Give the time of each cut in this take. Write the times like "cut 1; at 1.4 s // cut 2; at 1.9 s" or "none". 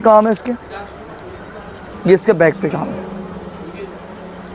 cut 1; at 1.9 s